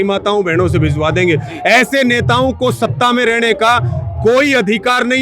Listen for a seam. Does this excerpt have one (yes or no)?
no